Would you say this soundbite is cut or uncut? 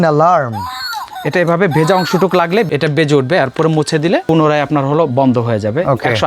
cut